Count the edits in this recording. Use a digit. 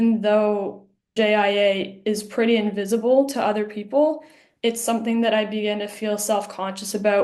1